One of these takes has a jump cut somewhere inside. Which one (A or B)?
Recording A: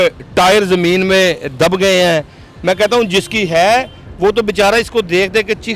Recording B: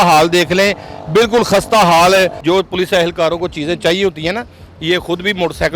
B